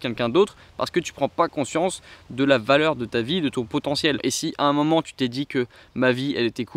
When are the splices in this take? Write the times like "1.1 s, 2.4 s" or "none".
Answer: 4.2 s